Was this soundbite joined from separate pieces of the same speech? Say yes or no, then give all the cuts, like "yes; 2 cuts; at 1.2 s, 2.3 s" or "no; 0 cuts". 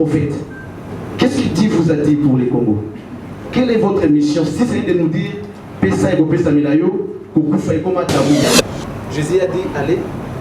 yes; 1 cut; at 8.5 s